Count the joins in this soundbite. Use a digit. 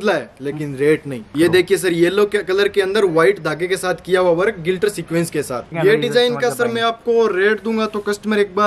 2